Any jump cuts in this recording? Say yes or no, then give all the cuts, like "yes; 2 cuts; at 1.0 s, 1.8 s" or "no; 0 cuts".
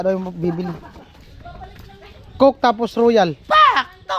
no; 0 cuts